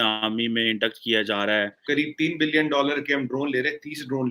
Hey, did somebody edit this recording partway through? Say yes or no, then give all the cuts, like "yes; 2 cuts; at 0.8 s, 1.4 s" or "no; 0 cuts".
yes; 1 cut; at 1.8 s